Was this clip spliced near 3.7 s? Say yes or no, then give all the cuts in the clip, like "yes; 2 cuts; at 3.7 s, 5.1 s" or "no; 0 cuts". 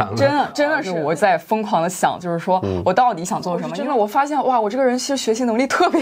yes; 2 cuts; at 0.9 s, 3.7 s